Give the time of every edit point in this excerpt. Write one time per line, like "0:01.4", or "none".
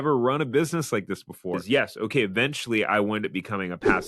0:01.6

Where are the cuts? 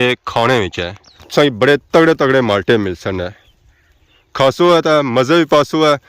0:01.1

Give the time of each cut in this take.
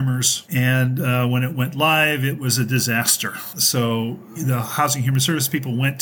0:03.5

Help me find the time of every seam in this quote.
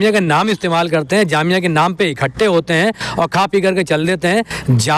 none

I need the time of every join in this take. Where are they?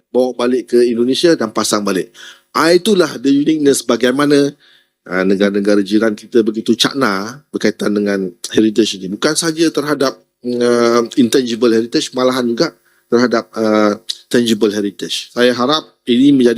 0:15.3

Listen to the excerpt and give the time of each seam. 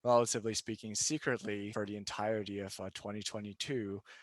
0:01.7

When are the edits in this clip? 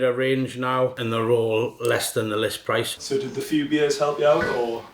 0:01.0
0:03.0

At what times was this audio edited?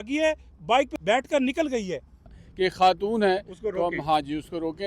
0:00.9
0:02.4

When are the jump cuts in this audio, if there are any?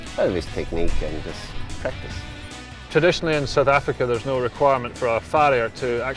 0:02.5

